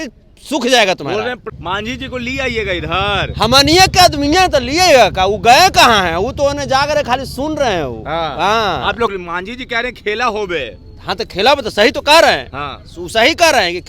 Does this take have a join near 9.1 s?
yes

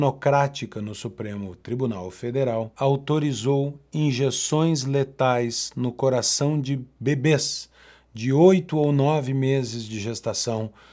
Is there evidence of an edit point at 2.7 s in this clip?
yes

